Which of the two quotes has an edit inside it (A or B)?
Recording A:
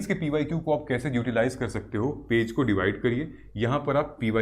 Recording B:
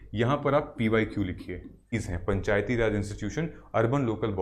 B